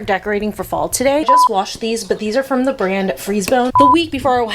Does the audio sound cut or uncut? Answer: cut